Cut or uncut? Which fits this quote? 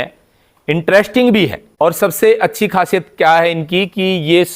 cut